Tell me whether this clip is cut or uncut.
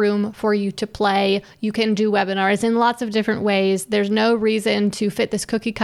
uncut